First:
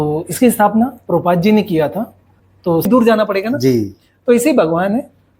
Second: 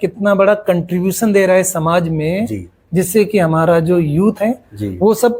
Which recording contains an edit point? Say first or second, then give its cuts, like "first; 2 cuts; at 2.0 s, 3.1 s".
first; 1 cut; at 2.9 s